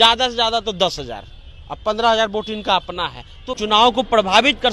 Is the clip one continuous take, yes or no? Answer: no